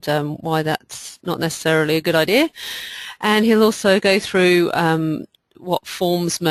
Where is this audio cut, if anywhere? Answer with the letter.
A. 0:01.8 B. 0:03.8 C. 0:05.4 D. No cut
D